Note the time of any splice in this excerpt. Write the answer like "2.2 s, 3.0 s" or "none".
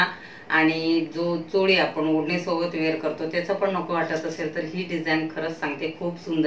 none

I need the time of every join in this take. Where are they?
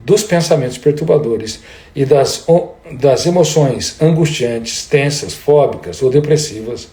none

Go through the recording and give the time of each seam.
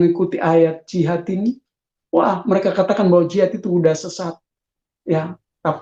none

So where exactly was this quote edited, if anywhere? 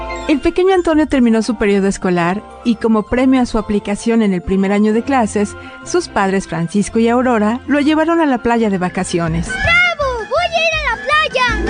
9.5 s

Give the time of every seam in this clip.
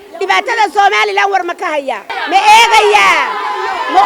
2.1 s

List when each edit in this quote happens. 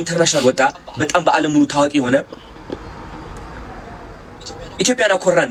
none

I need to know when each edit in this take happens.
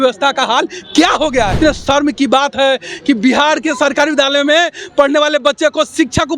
1.6 s

